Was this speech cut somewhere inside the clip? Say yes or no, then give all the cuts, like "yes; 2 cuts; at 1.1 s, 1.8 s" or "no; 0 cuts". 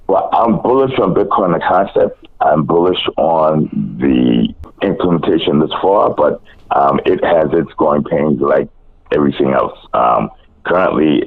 yes; 1 cut; at 4.6 s